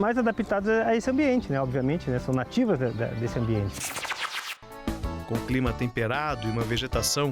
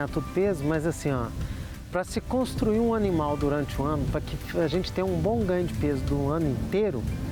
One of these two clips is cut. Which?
first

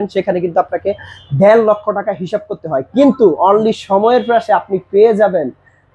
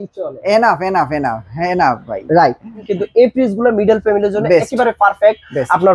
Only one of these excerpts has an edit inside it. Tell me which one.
second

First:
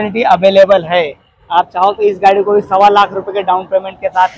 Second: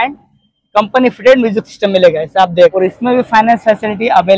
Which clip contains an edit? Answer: second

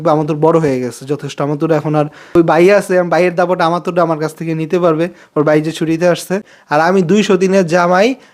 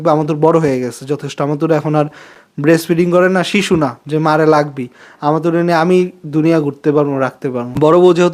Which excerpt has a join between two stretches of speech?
first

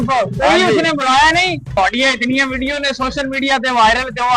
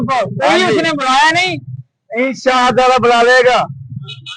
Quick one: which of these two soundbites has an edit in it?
first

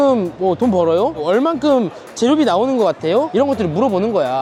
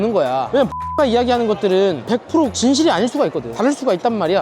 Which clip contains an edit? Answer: second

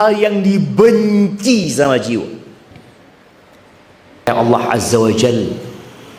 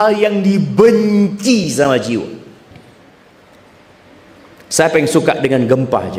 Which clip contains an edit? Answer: first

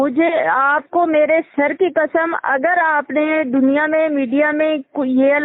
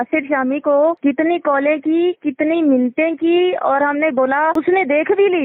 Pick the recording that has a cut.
second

